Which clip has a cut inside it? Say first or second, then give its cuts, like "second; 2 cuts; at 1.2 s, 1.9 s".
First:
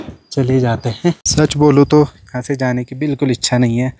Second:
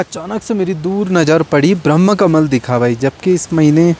first; 1 cut; at 1.2 s